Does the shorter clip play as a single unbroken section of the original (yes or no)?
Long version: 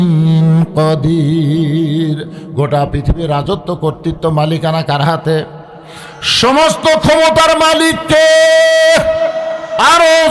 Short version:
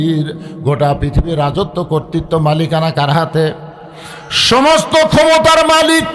yes